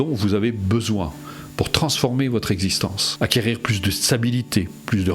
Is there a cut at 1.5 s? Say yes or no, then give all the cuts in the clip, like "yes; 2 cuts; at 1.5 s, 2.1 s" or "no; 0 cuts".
no; 1 cut; at 3.0 s